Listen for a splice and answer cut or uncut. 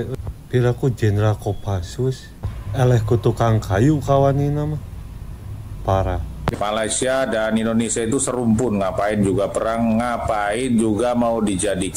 cut